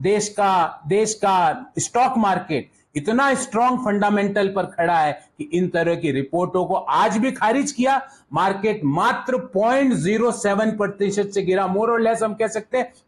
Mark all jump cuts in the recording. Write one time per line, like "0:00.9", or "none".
none